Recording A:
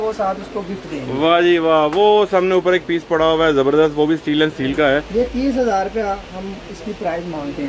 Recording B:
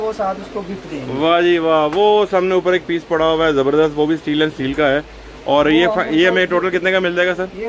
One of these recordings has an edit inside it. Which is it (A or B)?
A